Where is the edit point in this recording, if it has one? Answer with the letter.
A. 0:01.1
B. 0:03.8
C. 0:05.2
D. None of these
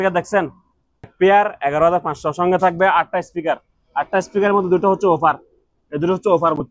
A